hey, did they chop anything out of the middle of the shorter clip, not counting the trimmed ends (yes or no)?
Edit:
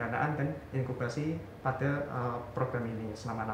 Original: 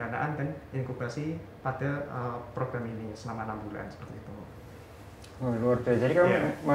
no